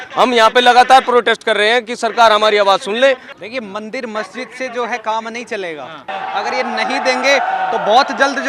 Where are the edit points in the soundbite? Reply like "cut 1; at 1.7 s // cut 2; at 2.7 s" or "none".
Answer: cut 1; at 3.3 s // cut 2; at 6.1 s